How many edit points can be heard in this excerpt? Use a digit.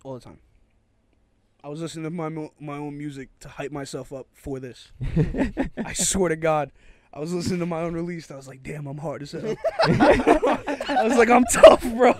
0